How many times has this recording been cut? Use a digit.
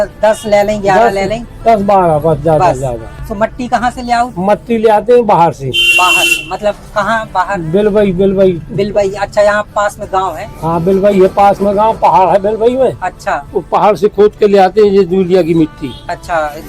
1